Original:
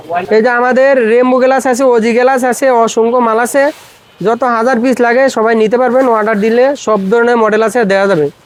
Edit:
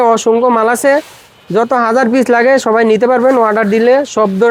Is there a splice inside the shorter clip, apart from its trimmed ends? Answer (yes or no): no